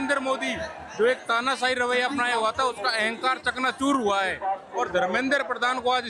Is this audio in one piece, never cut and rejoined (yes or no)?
yes